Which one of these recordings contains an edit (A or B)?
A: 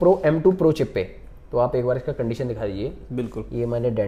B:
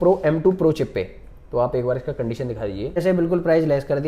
B